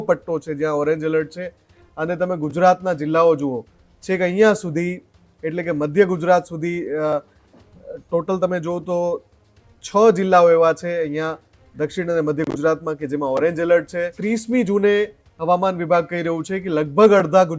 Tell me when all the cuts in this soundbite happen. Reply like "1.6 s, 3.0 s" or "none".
14.1 s